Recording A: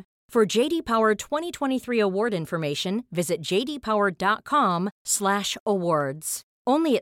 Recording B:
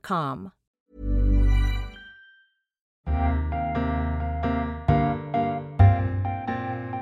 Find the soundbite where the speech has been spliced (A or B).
B